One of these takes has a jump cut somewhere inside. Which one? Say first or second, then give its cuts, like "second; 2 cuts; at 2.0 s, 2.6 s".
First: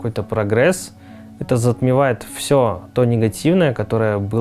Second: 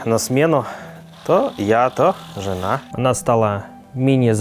second; 1 cut; at 2.9 s